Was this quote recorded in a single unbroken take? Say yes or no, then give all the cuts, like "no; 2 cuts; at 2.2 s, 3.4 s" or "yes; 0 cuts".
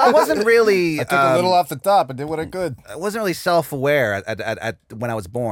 yes; 0 cuts